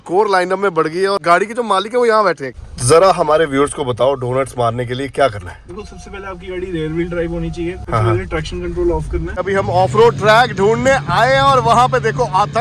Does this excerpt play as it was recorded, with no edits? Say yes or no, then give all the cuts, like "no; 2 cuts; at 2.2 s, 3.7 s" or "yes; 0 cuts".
no; 3 cuts; at 2.5 s, 7.8 s, 9.4 s